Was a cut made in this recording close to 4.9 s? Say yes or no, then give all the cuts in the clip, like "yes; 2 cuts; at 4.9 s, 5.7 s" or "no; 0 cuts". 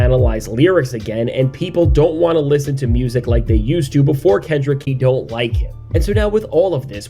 yes; 1 cut; at 4.9 s